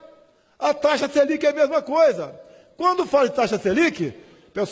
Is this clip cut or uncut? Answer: uncut